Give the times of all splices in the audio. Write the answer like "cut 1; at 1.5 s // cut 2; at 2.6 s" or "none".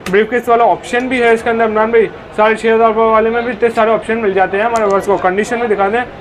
none